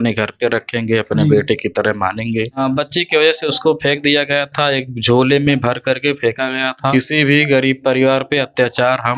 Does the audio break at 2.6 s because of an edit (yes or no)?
yes